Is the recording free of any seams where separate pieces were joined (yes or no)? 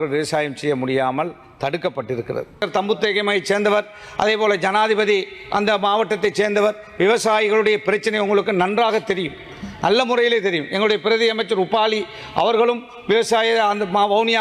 no